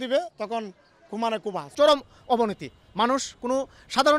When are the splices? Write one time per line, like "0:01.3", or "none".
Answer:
0:01.7